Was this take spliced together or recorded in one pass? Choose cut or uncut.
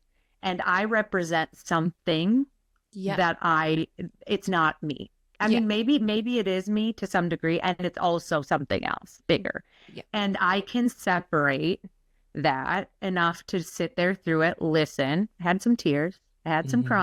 uncut